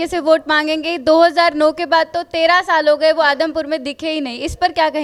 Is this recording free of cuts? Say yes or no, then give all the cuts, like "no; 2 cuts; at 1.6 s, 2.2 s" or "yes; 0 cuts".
yes; 0 cuts